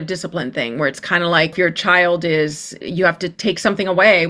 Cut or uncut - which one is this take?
cut